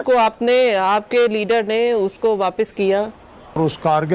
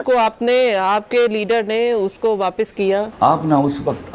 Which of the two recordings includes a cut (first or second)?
second